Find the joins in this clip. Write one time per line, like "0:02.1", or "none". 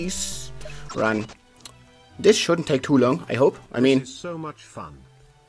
0:03.7